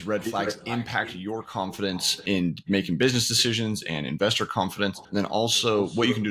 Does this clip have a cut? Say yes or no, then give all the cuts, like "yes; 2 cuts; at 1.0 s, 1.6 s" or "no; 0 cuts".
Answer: yes; 2 cuts; at 2.2 s, 5.0 s